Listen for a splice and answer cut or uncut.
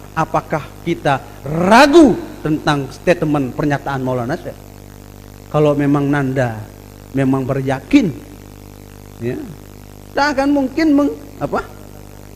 uncut